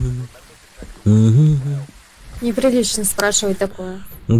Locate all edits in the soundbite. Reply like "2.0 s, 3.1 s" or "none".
2.5 s